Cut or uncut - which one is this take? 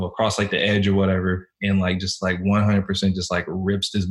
uncut